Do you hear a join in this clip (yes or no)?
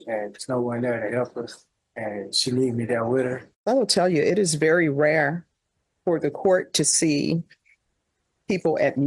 yes